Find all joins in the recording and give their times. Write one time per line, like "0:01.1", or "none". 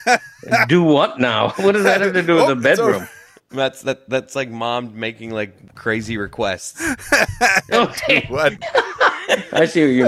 0:08.6